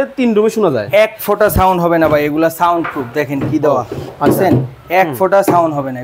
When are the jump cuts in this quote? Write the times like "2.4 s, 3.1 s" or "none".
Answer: none